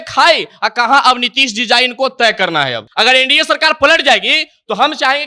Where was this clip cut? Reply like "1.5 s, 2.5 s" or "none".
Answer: 2.8 s